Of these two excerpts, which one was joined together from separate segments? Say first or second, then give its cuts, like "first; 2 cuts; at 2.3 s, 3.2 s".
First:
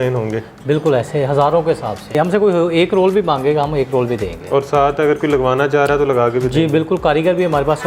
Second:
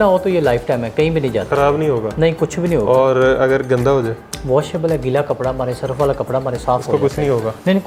first; 1 cut; at 2.1 s